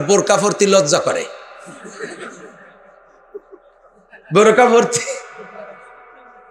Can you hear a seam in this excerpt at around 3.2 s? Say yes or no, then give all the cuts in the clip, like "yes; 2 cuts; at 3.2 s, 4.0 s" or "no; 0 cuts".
no; 0 cuts